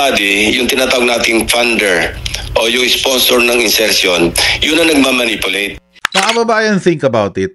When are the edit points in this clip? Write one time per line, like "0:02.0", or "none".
none

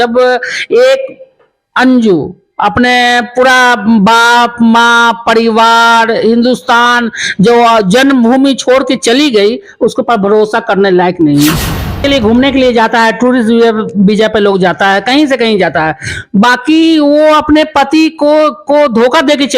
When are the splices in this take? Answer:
0:12.0

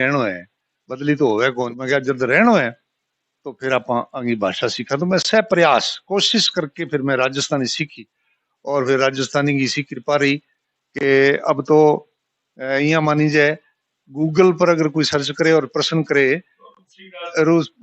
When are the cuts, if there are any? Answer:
0:01.7

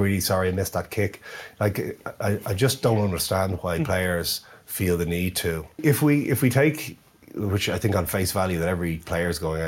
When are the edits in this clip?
0:05.8

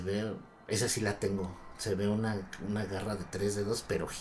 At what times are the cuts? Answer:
none

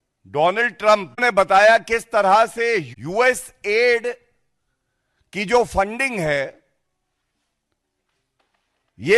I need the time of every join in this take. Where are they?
0:01.2
0:03.0

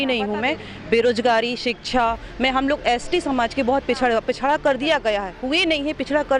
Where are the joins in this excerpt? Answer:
none

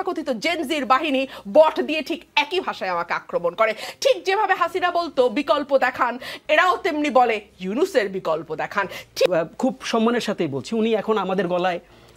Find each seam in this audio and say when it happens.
0:09.3

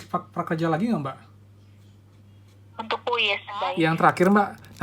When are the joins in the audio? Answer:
0:03.7

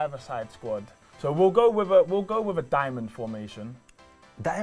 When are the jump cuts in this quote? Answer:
0:01.0

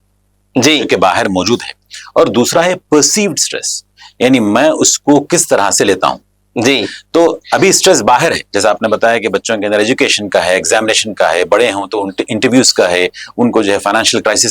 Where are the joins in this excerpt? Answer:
none

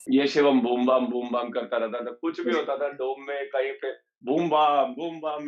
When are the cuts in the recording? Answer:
none

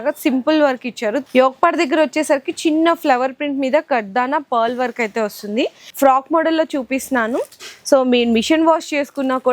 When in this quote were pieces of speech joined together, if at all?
0:01.2
0:05.8

